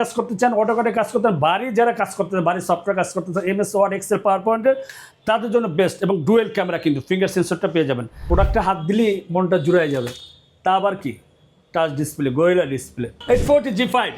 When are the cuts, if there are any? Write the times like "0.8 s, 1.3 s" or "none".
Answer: 8.2 s, 13.1 s